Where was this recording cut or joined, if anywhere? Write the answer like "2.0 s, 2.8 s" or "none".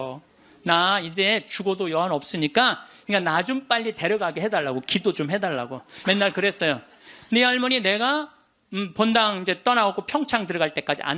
2.9 s, 5.9 s